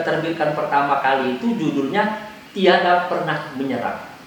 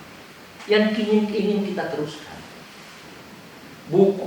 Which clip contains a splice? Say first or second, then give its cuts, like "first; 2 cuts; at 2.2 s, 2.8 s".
second; 1 cut; at 3.2 s